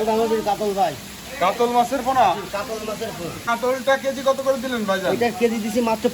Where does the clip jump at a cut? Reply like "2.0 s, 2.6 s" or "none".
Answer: 3.5 s